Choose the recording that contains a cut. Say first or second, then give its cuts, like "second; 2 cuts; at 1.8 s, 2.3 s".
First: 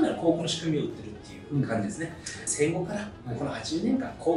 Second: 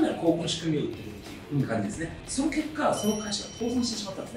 second; 1 cut; at 2.2 s